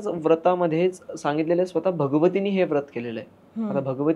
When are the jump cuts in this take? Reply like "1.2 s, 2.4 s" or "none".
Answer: none